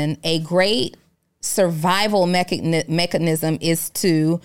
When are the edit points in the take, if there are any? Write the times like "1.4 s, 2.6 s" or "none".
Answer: none